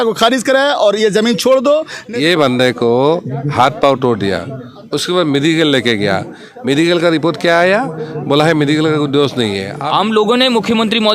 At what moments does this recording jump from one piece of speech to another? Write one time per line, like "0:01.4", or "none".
0:02.0
0:09.7